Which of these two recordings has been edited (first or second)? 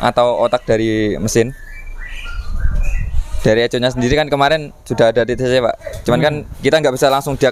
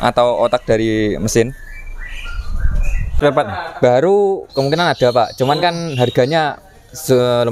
second